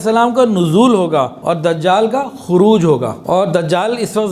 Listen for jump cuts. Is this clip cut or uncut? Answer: cut